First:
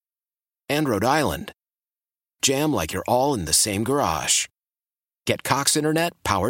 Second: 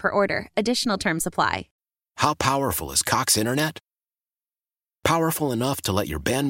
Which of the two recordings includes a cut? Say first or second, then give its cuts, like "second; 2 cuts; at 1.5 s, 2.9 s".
second; 1 cut; at 1.7 s